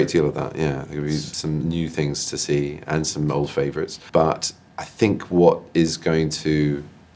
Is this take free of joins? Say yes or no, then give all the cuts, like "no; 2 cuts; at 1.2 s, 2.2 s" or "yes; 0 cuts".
yes; 0 cuts